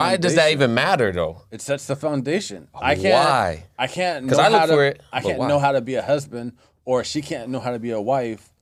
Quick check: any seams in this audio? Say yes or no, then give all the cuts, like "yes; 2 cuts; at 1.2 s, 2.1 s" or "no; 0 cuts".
no; 0 cuts